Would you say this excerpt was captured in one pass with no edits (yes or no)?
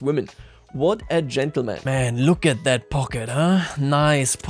no